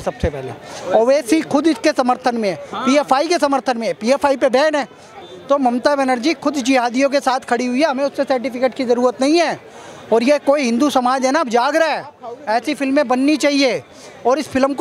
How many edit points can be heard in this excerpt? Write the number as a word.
one